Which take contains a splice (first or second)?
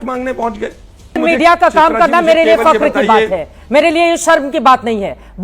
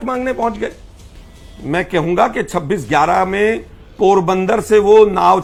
first